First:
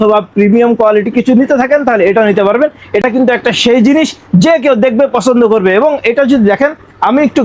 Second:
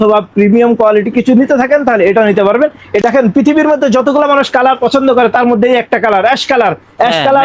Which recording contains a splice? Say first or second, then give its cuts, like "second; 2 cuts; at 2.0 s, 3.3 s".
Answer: second; 1 cut; at 3.0 s